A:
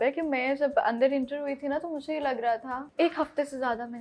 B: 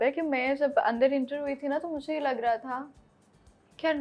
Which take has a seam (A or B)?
A